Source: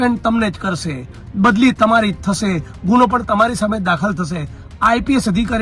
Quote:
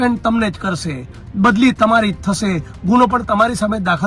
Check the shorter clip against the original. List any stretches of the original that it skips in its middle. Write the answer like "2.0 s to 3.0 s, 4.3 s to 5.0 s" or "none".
none